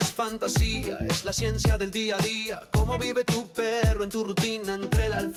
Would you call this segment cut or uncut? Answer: uncut